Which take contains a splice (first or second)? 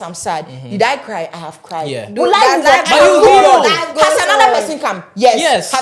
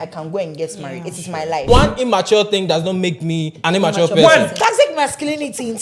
second